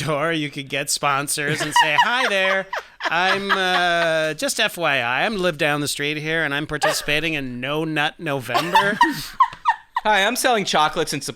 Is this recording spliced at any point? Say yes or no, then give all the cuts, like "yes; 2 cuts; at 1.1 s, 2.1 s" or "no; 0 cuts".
no; 0 cuts